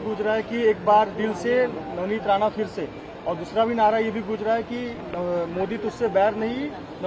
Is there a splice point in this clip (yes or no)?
no